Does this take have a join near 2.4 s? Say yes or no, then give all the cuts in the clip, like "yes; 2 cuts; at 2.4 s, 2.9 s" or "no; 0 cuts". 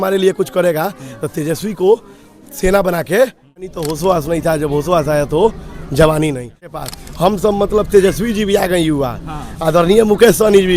no; 2 cuts; at 3.6 s, 6.8 s